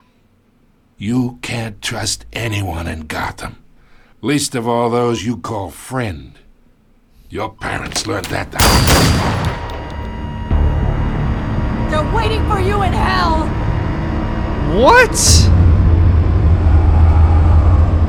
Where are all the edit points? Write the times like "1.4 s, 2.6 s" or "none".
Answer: none